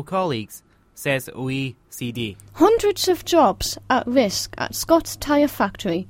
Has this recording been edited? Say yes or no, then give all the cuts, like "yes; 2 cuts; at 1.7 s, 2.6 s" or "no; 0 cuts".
yes; 1 cut; at 2.4 s